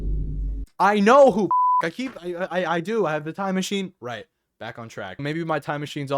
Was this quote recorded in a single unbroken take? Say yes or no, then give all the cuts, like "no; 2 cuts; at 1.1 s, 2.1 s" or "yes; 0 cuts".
no; 1 cut; at 5.2 s